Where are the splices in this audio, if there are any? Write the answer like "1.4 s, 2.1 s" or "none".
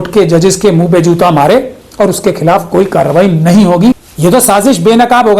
4.1 s